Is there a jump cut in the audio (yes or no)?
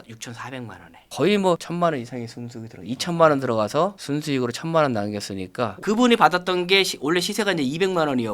yes